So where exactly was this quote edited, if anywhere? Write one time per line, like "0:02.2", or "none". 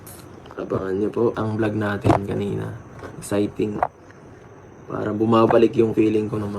0:01.4

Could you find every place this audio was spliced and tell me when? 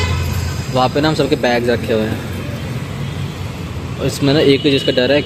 none

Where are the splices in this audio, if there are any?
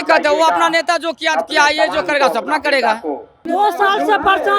0:03.4

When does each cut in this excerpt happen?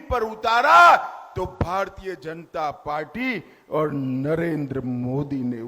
none

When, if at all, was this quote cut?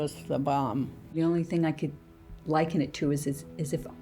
0:01.1

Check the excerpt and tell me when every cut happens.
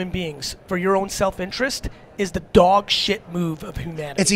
none

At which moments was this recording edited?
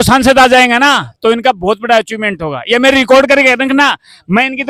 none

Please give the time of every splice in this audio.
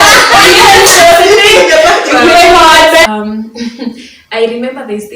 0:03.0

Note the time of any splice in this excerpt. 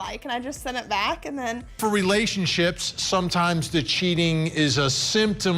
0:01.7

